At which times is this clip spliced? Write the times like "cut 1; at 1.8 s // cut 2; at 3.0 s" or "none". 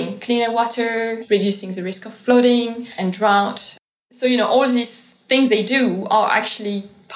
cut 1; at 1.2 s // cut 2; at 2.8 s // cut 3; at 3.8 s